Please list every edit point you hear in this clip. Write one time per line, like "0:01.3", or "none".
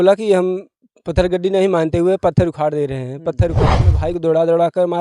0:03.9